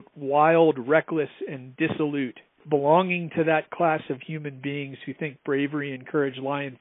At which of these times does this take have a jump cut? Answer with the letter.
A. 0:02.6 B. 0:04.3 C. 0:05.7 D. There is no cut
A